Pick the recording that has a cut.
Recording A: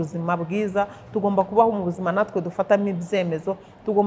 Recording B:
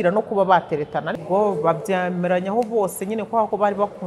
B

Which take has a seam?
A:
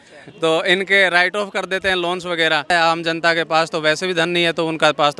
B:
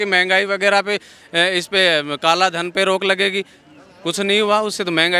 A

